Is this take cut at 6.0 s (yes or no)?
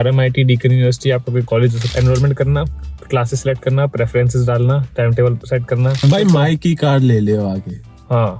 yes